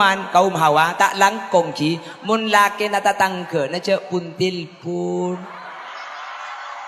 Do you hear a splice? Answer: no; 0 cuts

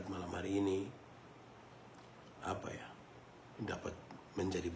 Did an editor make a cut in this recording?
no; 0 cuts

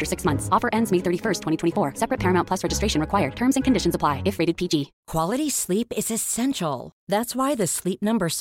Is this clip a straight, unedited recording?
no; 1 cut; at 5.0 s

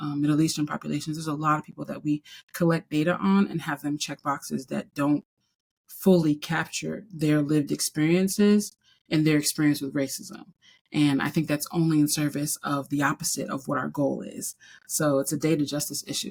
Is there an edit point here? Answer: no; 0 cuts

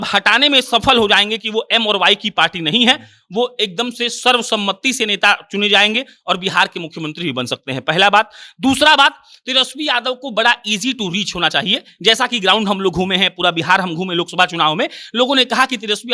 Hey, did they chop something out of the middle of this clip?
no; 0 cuts

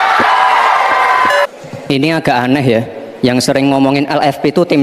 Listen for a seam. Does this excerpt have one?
yes; 1 cut; at 1.4 s

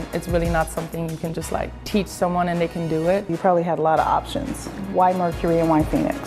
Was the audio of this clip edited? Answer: yes; 2 cuts; at 3.3 s, 4.9 s

